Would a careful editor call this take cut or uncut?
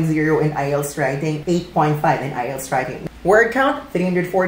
cut